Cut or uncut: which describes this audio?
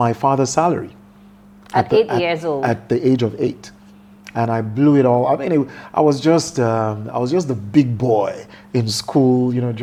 uncut